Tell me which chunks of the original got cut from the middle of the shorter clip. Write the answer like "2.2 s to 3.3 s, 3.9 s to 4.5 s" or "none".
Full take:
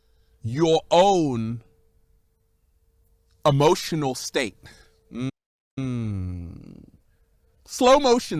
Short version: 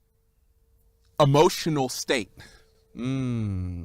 5.0 s to 5.4 s